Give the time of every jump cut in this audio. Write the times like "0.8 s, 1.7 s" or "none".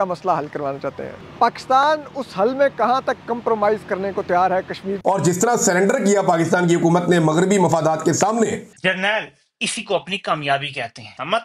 none